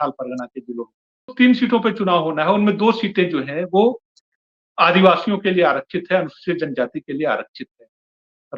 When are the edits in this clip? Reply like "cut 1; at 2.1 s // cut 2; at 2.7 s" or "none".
cut 1; at 1.3 s